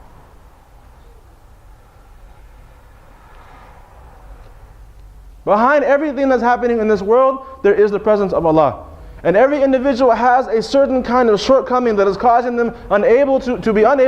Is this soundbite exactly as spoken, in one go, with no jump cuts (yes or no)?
no